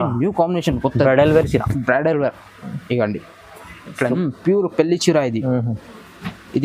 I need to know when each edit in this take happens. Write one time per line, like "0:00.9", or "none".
0:04.2